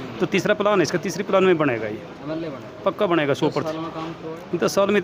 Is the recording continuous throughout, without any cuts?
yes; 0 cuts

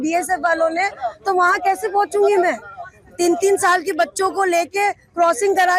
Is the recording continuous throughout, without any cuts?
yes; 0 cuts

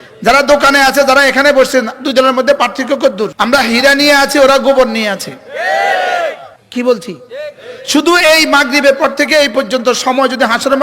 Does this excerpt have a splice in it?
yes; 2 cuts; at 3.3 s, 6.5 s

